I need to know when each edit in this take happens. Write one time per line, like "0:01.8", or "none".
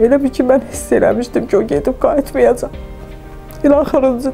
none

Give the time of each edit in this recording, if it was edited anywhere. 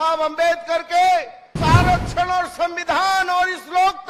0:01.4

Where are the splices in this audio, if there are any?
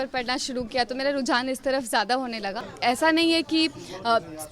0:02.7

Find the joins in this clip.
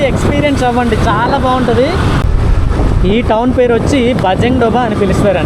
none

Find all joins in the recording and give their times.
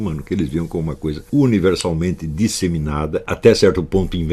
0:01.2
0:03.3

